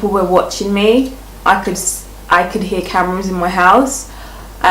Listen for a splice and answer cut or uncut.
uncut